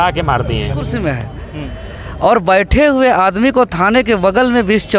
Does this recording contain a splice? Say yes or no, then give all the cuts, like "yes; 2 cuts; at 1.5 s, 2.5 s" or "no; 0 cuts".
yes; 1 cut; at 0.9 s